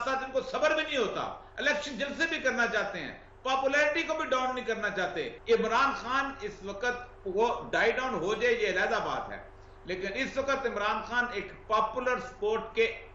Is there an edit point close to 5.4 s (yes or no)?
yes